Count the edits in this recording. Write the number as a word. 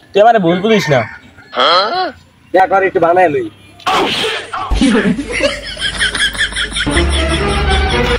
one